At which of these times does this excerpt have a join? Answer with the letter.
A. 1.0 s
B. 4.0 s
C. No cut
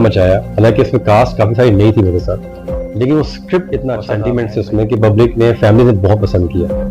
B